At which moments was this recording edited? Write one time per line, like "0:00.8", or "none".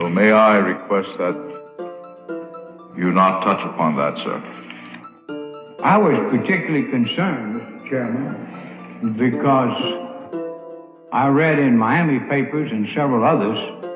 0:01.4

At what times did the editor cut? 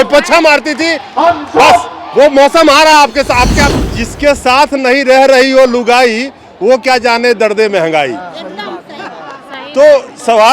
0:03.7

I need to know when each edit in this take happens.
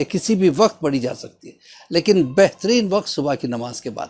none

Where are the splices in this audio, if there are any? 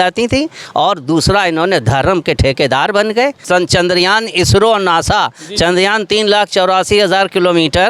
0:03.4

